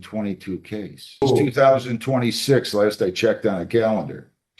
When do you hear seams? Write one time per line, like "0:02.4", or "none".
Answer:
0:01.2